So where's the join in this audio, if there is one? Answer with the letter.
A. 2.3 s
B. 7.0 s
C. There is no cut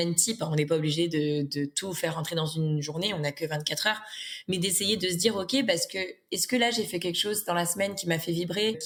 C